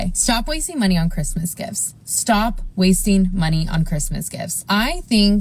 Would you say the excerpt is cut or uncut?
uncut